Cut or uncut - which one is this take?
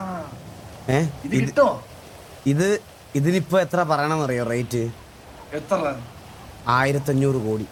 uncut